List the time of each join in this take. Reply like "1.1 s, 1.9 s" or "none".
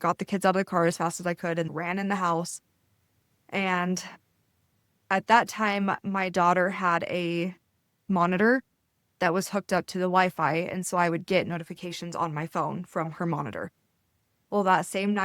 1.7 s

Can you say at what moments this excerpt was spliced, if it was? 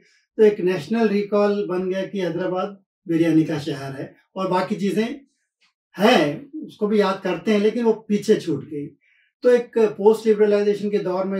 none

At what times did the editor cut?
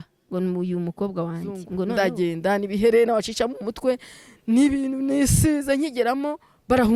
1.9 s

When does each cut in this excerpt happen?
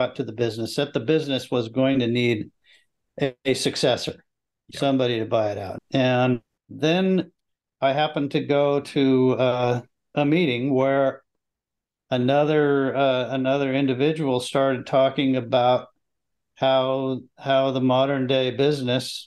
5.7 s, 6.5 s

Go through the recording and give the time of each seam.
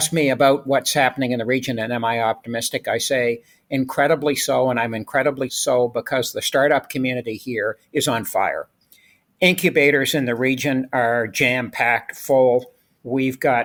none

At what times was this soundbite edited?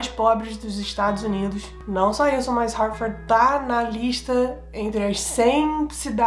1.7 s

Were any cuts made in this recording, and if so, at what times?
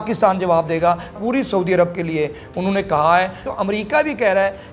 1.1 s, 3.5 s

